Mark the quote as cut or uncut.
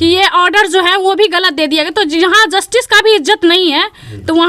uncut